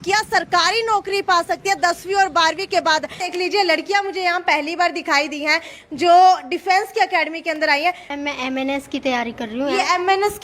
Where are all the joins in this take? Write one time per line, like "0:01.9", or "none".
0:03.2
0:08.1